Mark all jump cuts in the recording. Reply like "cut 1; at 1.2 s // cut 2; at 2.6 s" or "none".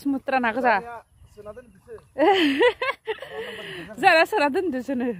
none